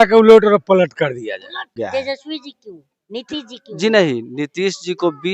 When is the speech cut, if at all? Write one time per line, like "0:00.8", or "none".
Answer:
0:01.7